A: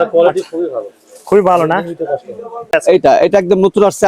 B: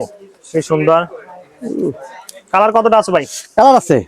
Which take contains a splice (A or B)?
A